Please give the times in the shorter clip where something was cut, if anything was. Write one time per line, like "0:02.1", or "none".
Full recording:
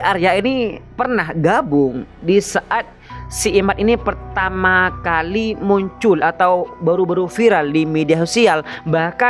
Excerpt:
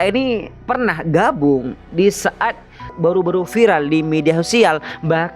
0:02.9